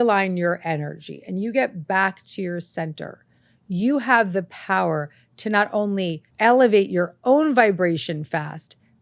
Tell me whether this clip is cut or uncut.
cut